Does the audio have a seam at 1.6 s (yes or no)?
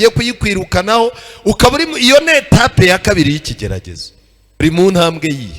no